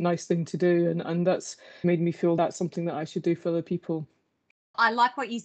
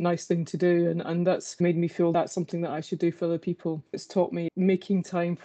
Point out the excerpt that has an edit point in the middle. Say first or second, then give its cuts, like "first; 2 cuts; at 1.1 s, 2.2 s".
second; 2 cuts; at 1.5 s, 4.5 s